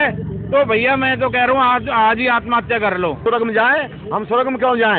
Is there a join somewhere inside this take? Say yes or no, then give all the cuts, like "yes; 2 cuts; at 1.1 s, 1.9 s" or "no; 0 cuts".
yes; 1 cut; at 3.2 s